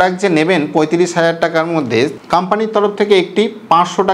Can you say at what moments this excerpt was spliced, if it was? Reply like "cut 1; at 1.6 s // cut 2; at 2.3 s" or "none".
cut 1; at 2.2 s